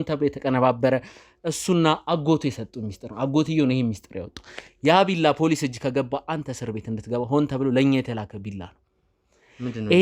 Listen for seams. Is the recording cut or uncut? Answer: uncut